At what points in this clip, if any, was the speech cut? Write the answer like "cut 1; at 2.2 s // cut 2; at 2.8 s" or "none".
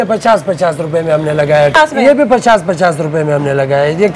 cut 1; at 1.8 s